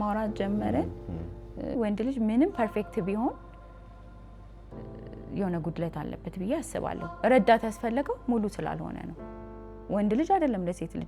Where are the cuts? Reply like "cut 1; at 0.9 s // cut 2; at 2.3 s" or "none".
cut 1; at 1.7 s